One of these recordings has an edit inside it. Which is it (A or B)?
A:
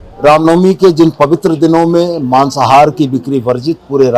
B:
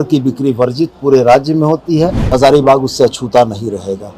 B